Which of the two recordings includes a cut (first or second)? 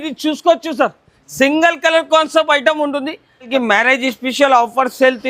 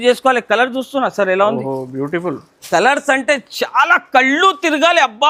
first